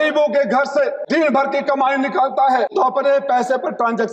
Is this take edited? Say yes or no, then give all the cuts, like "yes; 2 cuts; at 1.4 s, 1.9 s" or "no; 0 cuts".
yes; 2 cuts; at 1.0 s, 2.7 s